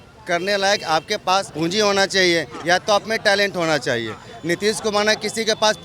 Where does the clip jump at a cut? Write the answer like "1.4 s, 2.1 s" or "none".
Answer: 1.5 s